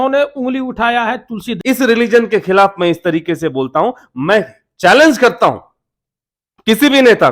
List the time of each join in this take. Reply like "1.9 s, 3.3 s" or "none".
1.5 s

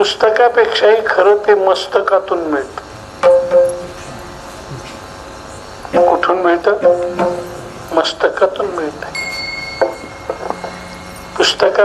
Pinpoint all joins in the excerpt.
none

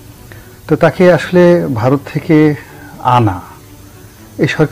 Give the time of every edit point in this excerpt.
none

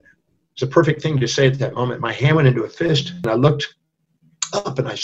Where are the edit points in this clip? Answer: 3.2 s

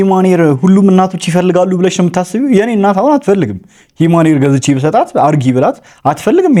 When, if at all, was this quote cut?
none

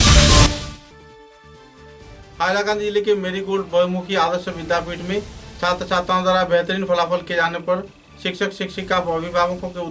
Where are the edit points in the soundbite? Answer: 1.7 s

